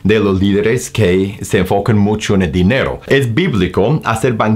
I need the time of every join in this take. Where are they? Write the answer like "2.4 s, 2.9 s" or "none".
3.1 s